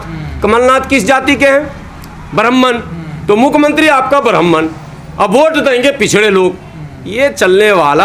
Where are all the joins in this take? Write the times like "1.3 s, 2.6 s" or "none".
none